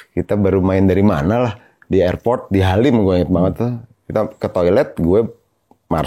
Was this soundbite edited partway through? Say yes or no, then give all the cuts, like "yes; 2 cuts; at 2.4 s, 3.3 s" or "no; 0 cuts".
no; 0 cuts